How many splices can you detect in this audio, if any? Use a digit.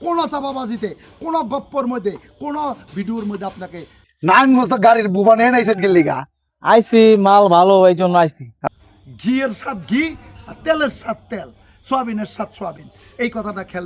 2